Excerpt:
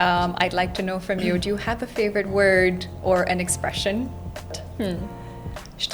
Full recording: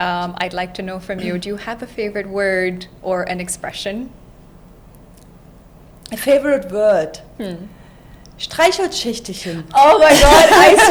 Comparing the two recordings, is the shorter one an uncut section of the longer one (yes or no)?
no